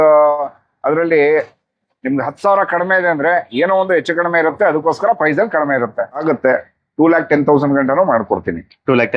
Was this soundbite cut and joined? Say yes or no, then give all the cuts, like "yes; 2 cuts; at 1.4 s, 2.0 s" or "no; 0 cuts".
yes; 1 cut; at 6.2 s